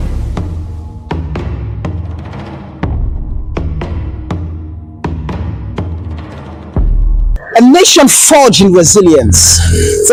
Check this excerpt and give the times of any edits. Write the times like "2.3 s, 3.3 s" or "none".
none